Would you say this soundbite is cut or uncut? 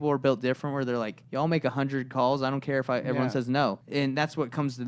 cut